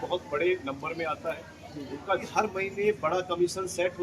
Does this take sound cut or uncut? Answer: cut